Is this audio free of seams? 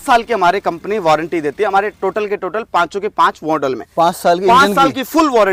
yes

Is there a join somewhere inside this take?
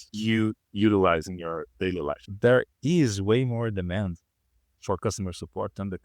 yes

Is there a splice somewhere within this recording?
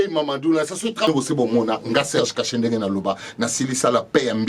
yes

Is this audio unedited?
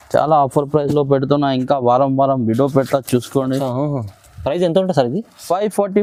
yes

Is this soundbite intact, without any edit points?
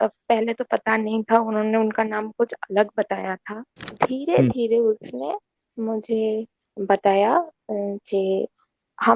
no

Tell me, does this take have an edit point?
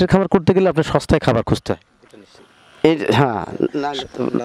no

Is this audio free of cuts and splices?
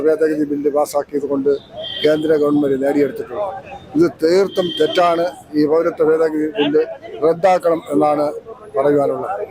yes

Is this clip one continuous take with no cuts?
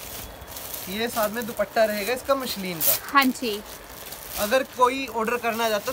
yes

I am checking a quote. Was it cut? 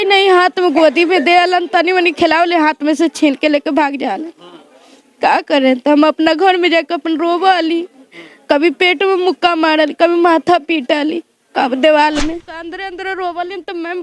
yes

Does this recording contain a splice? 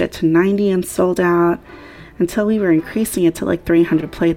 no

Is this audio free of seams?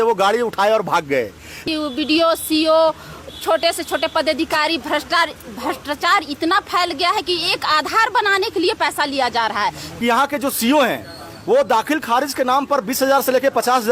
no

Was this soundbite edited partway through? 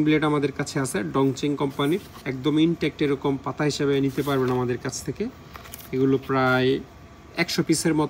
no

